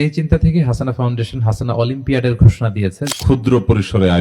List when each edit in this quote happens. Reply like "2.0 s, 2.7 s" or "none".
3.1 s